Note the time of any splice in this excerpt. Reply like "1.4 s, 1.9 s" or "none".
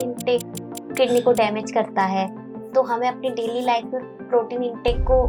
none